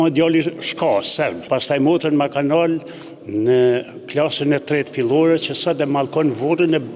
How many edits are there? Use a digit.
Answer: 1